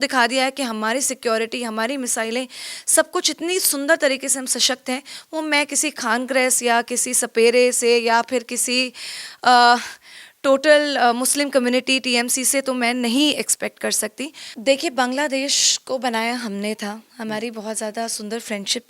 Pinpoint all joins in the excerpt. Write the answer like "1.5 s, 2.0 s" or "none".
14.4 s